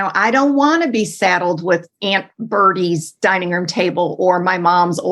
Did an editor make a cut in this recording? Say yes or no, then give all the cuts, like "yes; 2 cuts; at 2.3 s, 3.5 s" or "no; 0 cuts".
yes; 1 cut; at 1.9 s